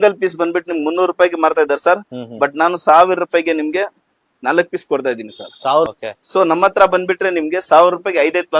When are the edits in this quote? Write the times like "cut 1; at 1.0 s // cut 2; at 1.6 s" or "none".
cut 1; at 5.9 s